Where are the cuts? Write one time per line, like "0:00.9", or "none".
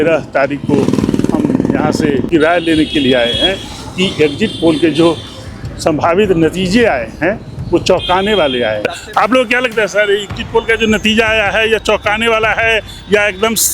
0:02.3
0:08.9